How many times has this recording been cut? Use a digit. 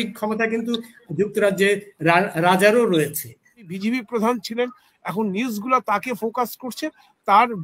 1